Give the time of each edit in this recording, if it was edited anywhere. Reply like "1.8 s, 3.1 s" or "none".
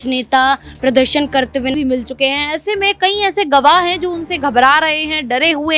1.7 s